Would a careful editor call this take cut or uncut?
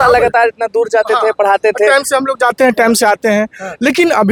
uncut